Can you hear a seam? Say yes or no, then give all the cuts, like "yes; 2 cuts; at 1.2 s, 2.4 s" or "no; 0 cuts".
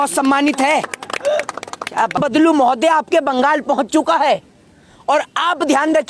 yes; 1 cut; at 2.2 s